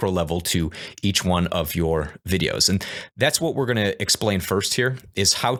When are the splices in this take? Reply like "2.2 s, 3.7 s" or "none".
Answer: none